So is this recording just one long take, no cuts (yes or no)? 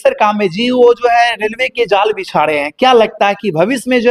yes